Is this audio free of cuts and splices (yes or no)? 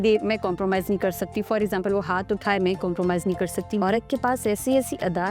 no